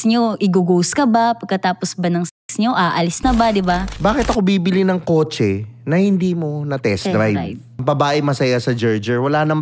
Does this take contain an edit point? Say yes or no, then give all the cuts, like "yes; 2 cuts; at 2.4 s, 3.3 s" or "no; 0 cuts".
yes; 2 cuts; at 3.9 s, 7.8 s